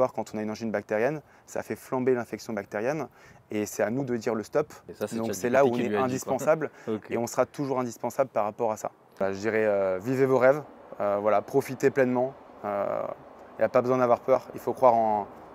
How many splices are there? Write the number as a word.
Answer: two